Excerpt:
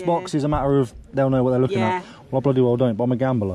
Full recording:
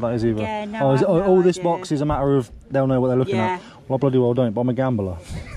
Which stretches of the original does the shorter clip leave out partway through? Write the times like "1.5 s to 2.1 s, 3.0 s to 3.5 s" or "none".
none